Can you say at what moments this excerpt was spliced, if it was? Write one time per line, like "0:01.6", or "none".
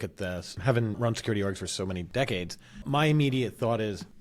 0:01.0
0:02.1
0:02.8

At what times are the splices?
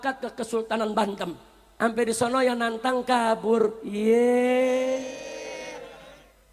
none

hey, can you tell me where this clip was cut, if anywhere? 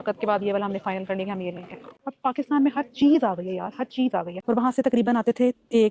0:02.0
0:04.4

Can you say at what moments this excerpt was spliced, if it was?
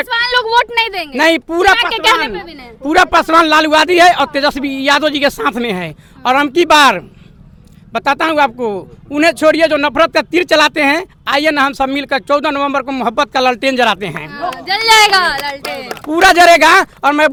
none

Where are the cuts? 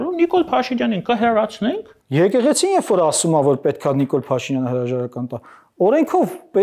0:01.9

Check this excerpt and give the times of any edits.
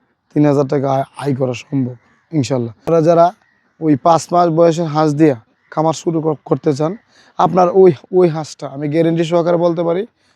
0:02.8

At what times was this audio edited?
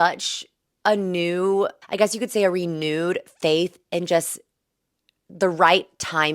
0:01.8

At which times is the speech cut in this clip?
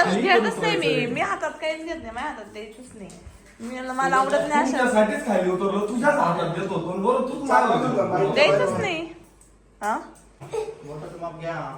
0:10.4

